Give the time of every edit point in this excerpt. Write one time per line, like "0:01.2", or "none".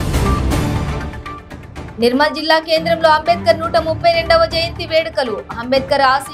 0:01.1
0:01.8